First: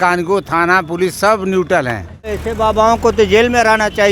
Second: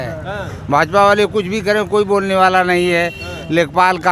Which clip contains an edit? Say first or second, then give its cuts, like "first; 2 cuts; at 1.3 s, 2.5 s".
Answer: first; 1 cut; at 2.4 s